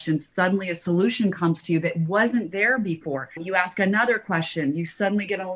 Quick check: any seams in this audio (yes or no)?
yes